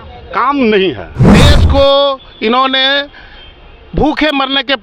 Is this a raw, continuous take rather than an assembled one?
no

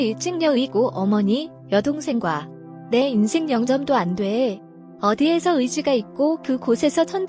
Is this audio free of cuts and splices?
yes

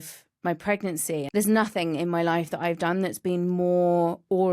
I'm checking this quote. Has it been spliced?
yes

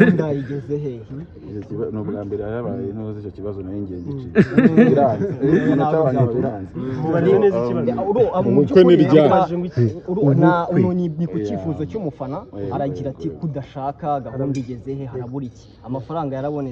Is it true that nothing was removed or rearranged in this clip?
yes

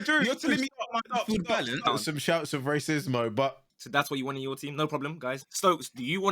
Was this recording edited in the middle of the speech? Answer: yes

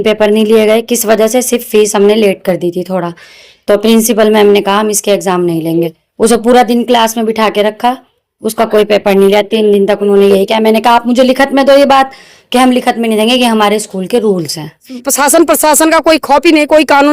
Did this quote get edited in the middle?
yes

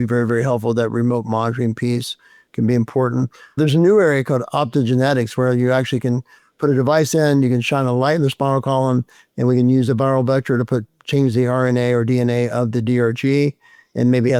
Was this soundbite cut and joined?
no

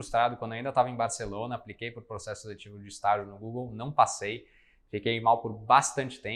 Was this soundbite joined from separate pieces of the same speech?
no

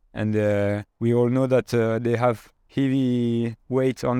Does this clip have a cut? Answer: yes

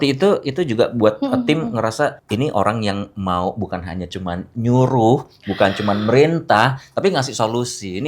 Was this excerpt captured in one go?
no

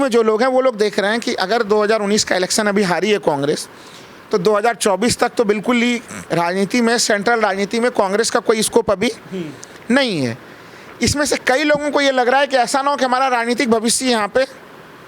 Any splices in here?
no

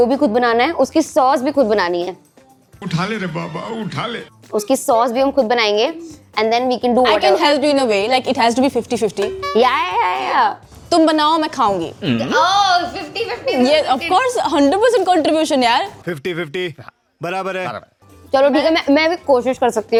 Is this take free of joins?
yes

